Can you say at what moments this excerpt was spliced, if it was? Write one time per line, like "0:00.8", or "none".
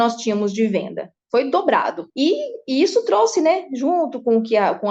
none